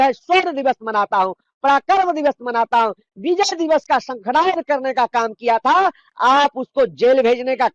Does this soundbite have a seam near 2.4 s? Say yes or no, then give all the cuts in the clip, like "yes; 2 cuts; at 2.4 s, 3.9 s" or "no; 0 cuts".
no; 0 cuts